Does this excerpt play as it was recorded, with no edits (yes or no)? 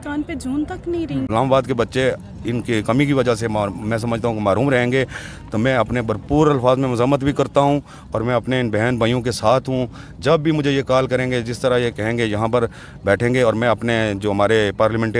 no